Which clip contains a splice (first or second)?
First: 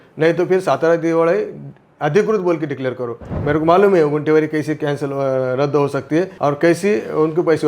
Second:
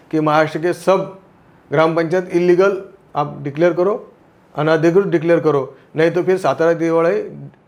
first